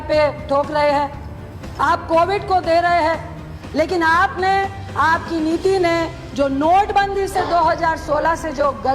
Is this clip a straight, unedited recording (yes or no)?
yes